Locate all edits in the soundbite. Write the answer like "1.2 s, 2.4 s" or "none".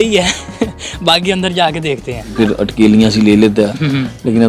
2.3 s